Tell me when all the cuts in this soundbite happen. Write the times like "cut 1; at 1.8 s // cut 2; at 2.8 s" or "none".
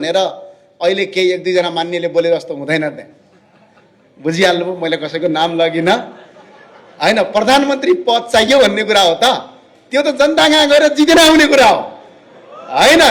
none